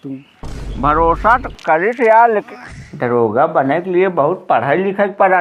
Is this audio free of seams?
no; 1 cut; at 2.5 s

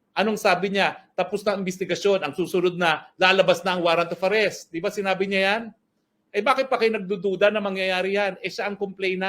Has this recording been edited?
no; 0 cuts

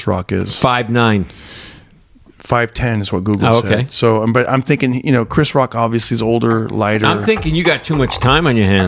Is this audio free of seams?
yes; 0 cuts

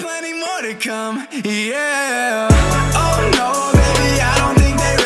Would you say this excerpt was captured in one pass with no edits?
yes; 0 cuts

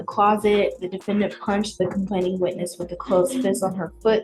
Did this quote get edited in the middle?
no; 0 cuts

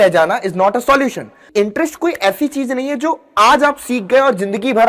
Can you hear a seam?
yes; 1 cut; at 1.5 s

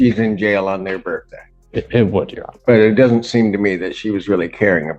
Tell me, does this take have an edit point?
no; 0 cuts

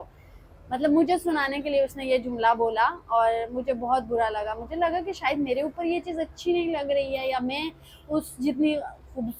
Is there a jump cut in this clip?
no; 0 cuts

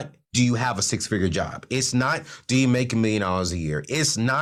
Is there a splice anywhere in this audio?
no; 0 cuts

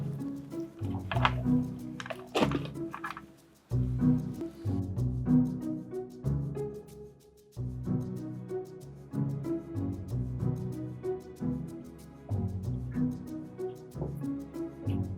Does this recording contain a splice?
yes; 1 cut; at 4.3 s

